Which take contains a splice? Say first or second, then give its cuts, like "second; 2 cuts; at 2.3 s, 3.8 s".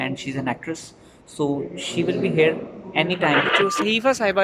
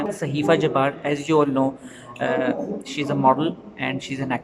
first; 1 cut; at 3.5 s